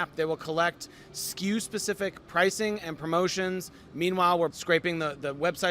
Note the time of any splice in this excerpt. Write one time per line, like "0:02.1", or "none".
0:04.5